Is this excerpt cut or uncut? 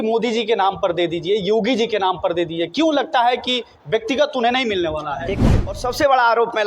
cut